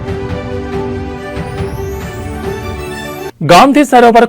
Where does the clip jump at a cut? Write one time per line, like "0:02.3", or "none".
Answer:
0:03.1